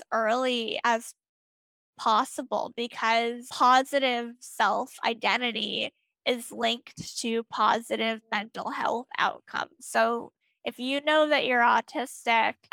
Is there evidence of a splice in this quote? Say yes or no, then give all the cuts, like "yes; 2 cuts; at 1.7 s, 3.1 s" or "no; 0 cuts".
no; 0 cuts